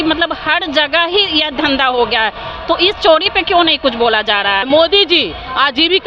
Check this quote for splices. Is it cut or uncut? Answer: cut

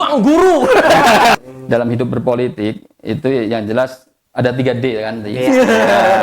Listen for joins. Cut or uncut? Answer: cut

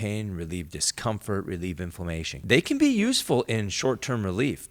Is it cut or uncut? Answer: cut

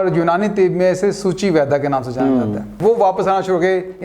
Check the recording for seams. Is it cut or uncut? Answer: cut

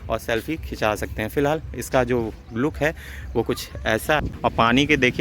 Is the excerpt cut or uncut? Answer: cut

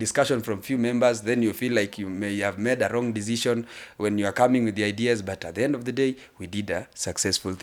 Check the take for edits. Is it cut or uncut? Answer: uncut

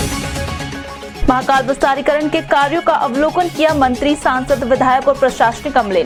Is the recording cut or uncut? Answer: uncut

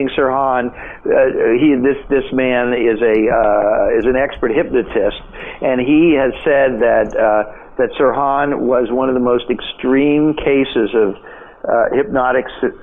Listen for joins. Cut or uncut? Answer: uncut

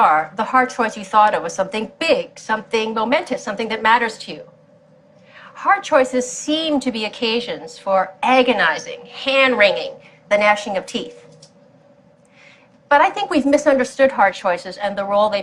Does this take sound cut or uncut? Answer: uncut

